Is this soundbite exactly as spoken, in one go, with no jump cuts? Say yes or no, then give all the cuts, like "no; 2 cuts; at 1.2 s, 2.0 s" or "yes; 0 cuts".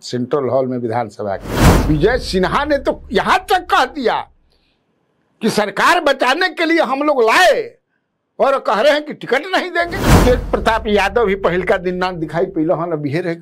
no; 2 cuts; at 1.7 s, 10.2 s